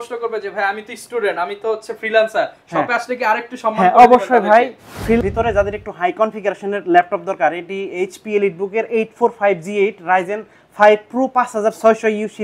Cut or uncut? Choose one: cut